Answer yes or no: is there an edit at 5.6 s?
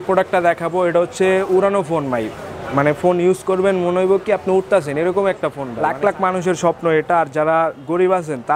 yes